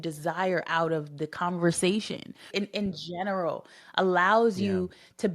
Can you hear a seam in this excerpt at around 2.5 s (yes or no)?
yes